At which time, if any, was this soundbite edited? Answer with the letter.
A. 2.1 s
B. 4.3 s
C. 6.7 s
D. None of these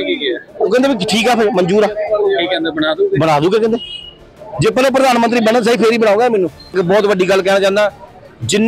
C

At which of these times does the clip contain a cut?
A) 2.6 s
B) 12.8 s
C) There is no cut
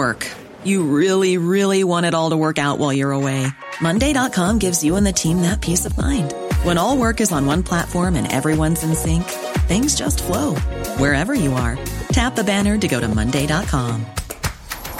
C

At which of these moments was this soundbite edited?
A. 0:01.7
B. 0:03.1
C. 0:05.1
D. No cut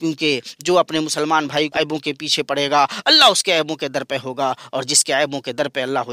A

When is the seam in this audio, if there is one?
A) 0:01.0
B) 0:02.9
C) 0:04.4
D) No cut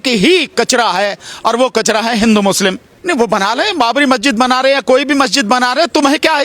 B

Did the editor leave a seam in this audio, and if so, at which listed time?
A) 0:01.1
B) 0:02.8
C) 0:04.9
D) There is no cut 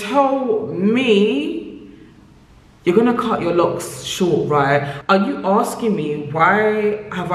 C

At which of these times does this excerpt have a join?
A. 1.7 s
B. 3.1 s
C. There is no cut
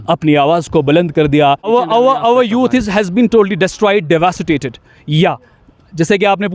A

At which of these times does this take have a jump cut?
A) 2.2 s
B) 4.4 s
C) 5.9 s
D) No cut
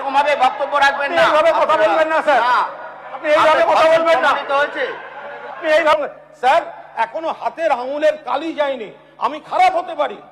C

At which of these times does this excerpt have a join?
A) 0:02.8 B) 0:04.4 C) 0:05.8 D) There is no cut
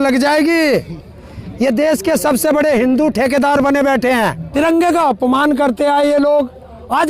B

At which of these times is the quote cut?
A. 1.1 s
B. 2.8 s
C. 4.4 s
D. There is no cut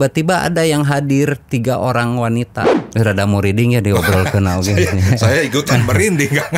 B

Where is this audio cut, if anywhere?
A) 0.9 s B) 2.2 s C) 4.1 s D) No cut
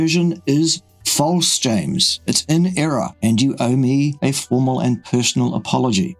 D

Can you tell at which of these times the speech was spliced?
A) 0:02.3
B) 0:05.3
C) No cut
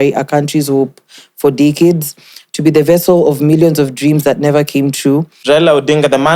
B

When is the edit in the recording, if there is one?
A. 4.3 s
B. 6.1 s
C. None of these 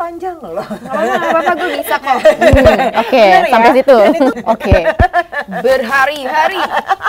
A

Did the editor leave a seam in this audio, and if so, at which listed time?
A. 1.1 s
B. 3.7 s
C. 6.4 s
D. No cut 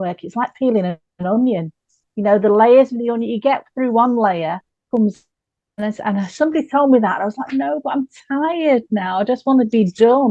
A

